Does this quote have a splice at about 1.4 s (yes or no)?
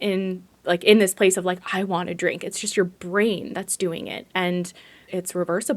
no